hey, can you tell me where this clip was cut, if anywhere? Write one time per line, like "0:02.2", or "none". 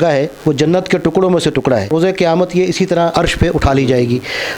0:01.9
0:03.1

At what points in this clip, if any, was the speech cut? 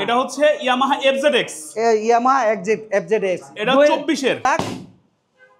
0:04.5

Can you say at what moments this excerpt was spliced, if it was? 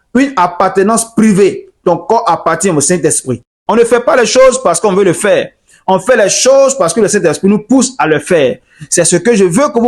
0:03.6

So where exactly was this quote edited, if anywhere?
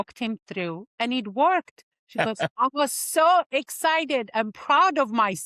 0:02.2

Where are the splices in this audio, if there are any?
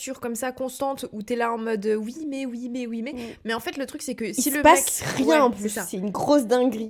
none

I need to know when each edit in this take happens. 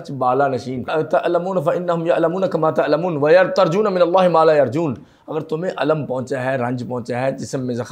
0:00.9

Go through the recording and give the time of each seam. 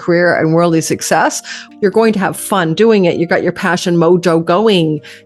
0:01.6

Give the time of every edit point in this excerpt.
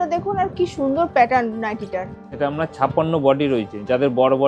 0:02.2

